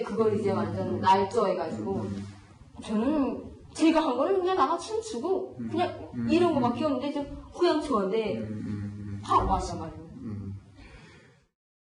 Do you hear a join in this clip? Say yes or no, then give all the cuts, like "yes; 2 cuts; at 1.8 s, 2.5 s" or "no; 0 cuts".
no; 0 cuts